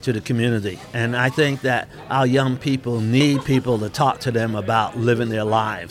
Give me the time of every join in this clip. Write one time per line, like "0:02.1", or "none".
0:03.2